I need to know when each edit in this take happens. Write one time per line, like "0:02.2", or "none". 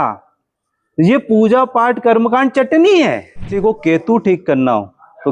0:03.5